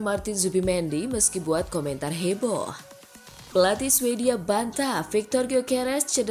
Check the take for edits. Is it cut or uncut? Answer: cut